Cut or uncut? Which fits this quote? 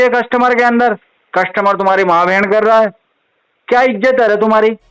uncut